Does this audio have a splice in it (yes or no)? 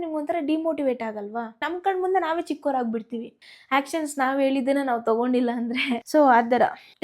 no